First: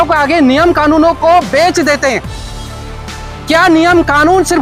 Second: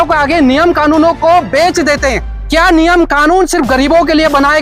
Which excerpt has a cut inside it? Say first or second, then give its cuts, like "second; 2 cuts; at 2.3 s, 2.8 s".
second; 1 cut; at 2.3 s